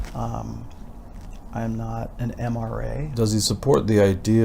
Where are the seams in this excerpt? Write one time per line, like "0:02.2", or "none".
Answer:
0:03.1